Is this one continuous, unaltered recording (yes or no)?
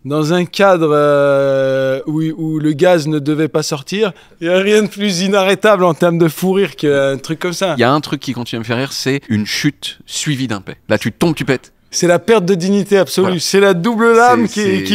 no